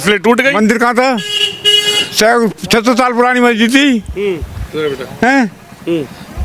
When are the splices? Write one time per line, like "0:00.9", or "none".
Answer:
none